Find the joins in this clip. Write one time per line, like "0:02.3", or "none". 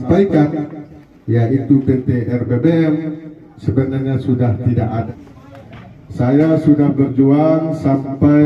0:05.1

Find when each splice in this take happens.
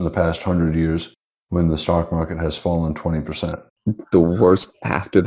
0:03.7

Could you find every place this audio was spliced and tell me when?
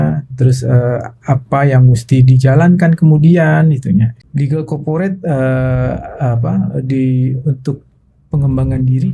0:04.2

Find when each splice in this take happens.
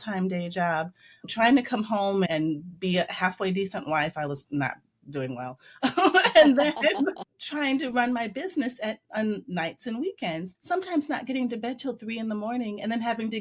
0:01.3
0:02.3
0:10.5

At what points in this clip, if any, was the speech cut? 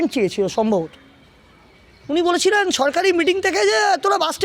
none

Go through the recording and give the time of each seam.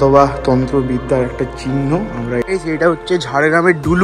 0:02.4

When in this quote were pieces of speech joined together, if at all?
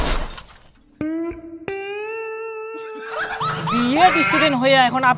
0:03.1

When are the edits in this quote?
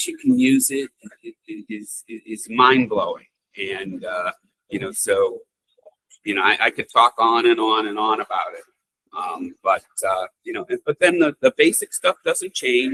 none

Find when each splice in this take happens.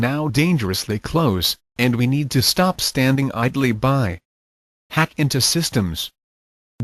0:02.8

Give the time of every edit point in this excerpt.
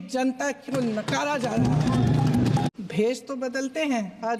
0:02.7

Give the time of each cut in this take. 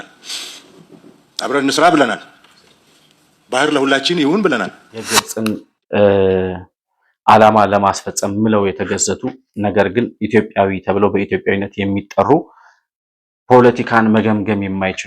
0:05.3

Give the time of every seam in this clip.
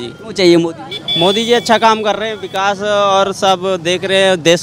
none

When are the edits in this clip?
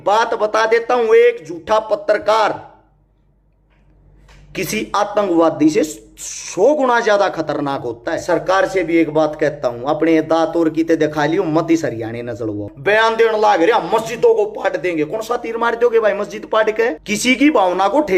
0:08.2
0:12.7
0:17.1

